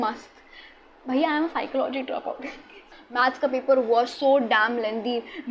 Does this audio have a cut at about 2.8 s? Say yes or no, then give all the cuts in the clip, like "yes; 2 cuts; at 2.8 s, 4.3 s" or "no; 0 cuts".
yes; 1 cut; at 2.8 s